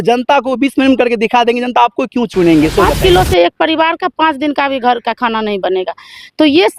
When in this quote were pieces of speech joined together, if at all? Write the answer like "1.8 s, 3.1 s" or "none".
2.9 s